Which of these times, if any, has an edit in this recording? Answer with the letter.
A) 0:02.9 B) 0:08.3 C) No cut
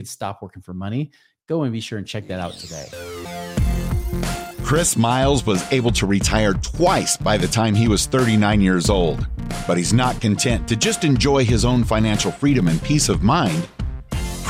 A